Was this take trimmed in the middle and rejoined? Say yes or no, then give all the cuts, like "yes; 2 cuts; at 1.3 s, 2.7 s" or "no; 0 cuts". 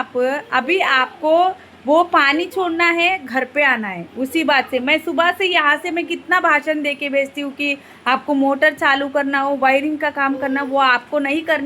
no; 0 cuts